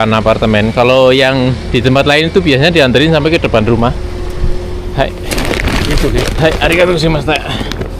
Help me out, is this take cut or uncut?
uncut